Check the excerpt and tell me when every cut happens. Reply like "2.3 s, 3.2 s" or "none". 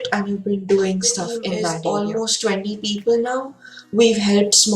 1.7 s